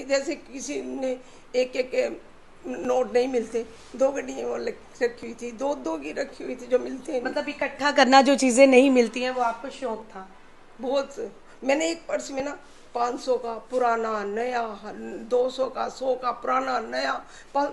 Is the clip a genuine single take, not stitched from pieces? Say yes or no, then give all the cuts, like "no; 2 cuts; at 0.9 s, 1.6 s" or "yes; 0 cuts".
yes; 0 cuts